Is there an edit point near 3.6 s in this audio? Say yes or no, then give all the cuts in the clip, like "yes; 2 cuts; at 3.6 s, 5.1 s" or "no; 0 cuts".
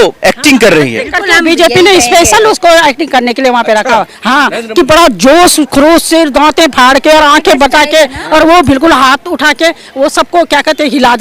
no; 0 cuts